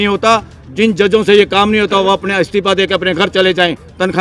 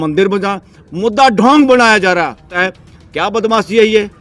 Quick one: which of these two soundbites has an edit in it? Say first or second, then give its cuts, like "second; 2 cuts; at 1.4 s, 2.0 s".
second; 1 cut; at 2.5 s